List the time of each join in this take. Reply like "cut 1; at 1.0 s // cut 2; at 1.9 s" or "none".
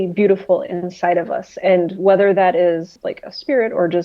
cut 1; at 2.9 s